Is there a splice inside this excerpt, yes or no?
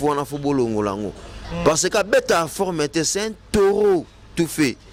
no